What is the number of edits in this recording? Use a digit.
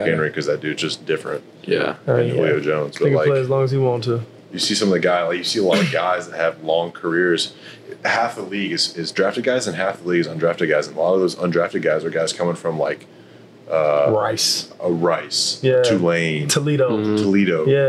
0